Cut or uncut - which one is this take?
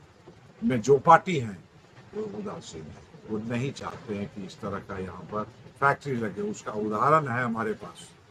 uncut